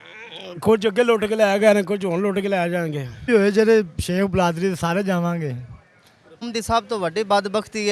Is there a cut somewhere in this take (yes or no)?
yes